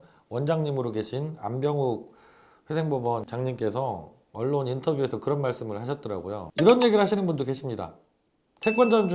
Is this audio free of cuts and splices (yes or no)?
no